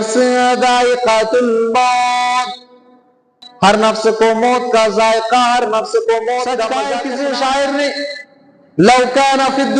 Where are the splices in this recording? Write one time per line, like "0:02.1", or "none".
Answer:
0:06.8